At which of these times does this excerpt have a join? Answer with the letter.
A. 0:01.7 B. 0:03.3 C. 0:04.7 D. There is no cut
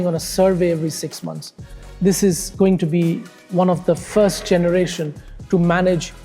A